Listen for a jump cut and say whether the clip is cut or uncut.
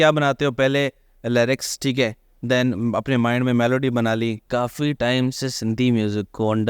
cut